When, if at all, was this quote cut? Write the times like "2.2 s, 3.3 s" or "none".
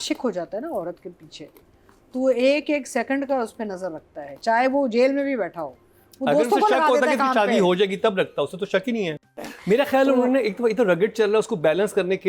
9.1 s